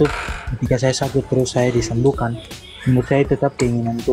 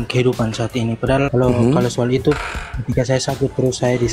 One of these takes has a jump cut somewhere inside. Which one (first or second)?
second